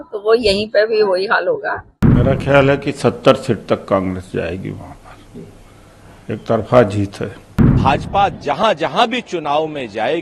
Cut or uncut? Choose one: cut